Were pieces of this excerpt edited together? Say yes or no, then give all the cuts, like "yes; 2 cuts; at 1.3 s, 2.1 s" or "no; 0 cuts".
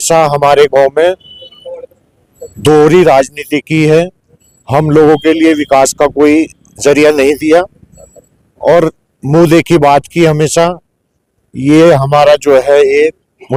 no; 0 cuts